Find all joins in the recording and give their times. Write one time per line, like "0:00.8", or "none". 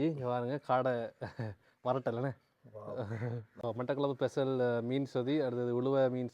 0:03.5